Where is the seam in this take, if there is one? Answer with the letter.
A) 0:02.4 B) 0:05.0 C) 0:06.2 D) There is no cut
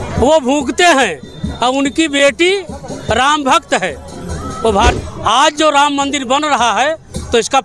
B